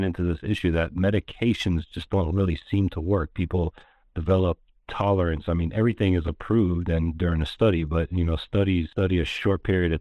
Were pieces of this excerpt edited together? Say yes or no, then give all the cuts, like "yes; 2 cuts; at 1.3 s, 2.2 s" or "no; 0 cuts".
yes; 1 cut; at 8.9 s